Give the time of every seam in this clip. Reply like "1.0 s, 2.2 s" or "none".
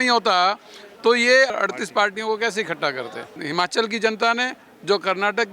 1.5 s, 3.4 s

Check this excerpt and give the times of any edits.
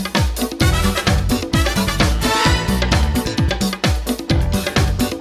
none

